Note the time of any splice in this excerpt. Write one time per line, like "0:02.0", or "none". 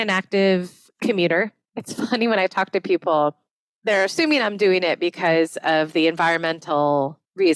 0:01.6